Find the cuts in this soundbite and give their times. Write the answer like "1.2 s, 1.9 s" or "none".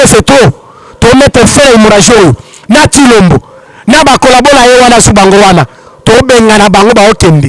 none